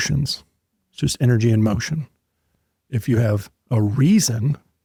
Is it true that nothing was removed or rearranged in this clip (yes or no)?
yes